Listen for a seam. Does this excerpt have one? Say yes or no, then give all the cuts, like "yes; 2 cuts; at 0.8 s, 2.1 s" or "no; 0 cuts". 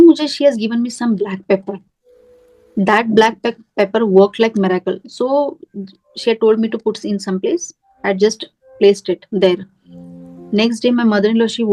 no; 0 cuts